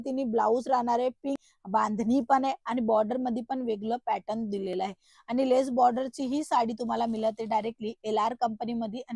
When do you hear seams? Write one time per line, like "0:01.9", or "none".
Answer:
0:01.4